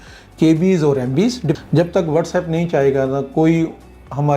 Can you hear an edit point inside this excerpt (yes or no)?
yes